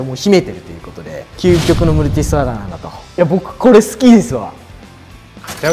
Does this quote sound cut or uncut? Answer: cut